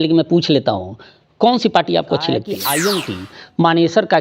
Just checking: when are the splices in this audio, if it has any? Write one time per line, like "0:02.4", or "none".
0:02.6